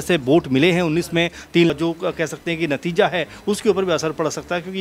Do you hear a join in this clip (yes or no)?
yes